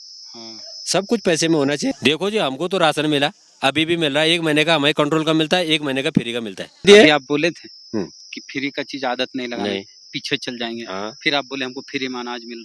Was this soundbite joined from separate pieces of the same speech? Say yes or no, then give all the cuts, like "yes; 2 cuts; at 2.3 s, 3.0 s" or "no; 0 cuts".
yes; 2 cuts; at 1.9 s, 6.8 s